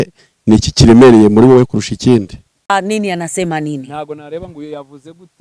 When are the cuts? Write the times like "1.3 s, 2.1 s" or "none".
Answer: 2.7 s